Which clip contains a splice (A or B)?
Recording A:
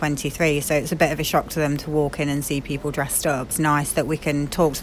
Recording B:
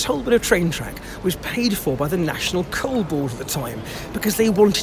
A